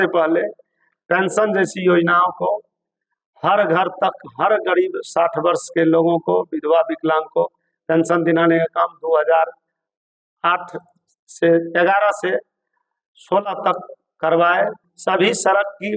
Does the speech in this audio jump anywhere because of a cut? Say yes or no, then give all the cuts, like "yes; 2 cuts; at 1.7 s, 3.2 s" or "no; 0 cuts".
yes; 1 cut; at 14.8 s